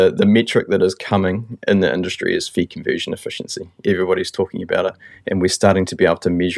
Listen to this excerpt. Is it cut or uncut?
uncut